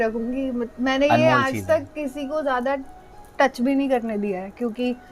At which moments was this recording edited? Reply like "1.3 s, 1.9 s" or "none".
none